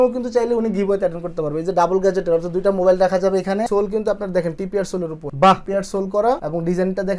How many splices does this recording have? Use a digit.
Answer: 1